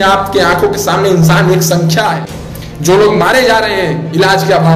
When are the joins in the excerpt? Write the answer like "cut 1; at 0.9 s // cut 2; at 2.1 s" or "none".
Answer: cut 1; at 2.2 s